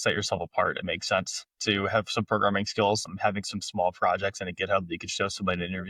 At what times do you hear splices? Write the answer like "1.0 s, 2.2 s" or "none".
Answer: 3.1 s